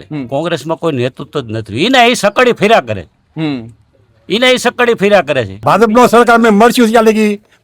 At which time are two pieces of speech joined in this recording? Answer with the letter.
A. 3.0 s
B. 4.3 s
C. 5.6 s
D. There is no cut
C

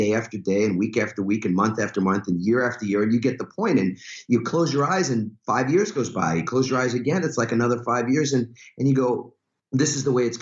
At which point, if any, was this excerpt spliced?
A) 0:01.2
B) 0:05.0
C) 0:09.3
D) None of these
D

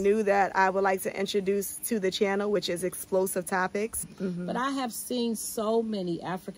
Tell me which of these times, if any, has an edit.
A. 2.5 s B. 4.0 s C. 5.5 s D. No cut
B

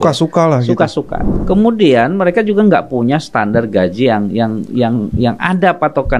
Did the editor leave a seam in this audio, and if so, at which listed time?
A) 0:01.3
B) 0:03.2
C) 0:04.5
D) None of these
A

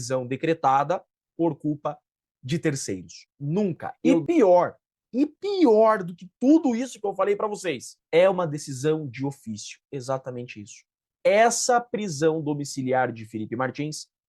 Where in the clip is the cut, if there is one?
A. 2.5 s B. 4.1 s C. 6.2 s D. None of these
B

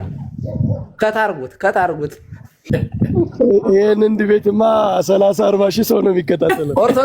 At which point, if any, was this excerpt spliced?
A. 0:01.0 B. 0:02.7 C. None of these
B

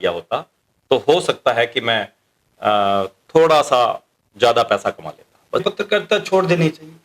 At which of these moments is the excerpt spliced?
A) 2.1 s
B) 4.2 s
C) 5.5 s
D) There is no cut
C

